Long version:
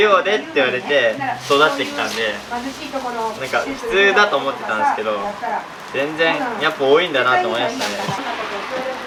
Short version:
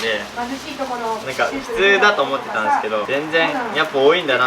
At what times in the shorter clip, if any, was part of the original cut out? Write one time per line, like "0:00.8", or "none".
0:03.0